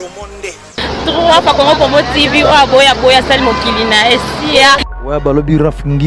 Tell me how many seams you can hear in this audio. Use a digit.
1